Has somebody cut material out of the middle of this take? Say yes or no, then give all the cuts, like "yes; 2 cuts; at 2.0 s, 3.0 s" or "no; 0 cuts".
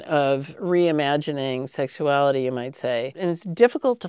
yes; 1 cut; at 3.1 s